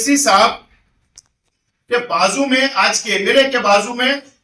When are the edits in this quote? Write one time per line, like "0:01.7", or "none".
none

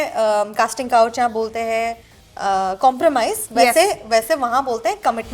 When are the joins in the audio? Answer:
none

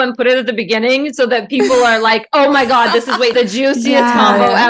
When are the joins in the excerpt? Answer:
0:03.3

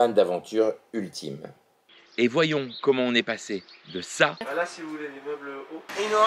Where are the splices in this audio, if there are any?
0:01.9

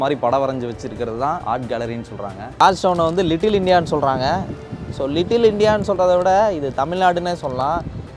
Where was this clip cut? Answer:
0:01.4
0:02.6

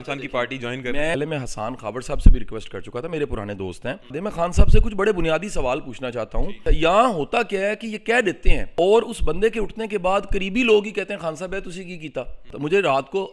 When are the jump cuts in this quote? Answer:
0:01.2
0:04.2
0:06.6
0:08.7
0:12.5

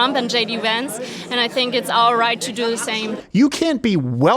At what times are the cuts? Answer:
0:03.2

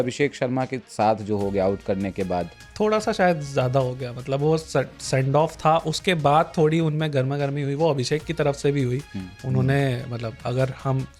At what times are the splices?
0:02.6

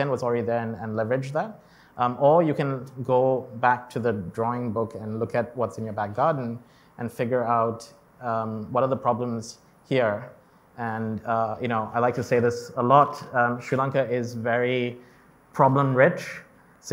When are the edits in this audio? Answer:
none

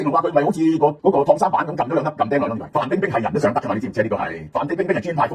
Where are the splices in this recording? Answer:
0:01.0
0:02.6
0:04.4

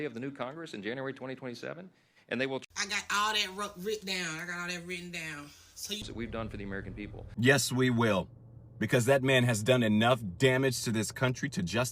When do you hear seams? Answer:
0:06.1

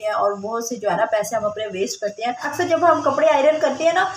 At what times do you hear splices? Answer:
0:02.5

